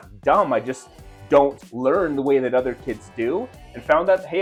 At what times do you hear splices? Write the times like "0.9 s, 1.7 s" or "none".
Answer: none